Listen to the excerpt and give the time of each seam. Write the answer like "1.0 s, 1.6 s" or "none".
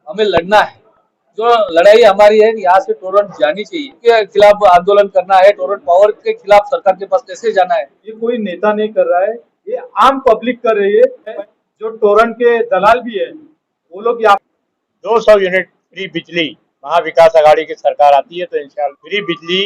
4.0 s, 8.0 s, 11.4 s, 14.4 s, 18.9 s